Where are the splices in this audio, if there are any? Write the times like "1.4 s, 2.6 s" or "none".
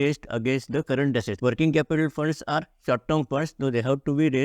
1.3 s